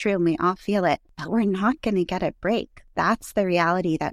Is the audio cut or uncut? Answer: cut